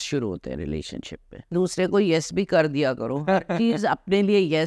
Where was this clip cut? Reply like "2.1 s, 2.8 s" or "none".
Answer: 1.5 s